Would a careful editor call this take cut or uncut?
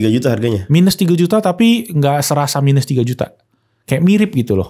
uncut